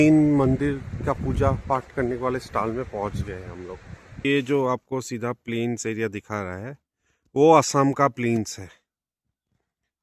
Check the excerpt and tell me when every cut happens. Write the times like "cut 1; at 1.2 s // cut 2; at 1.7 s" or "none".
cut 1; at 4.2 s